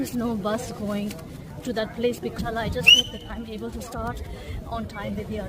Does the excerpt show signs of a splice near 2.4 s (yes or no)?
yes